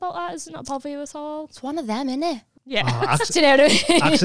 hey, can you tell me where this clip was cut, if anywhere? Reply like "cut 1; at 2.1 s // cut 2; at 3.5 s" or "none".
cut 1; at 2.5 s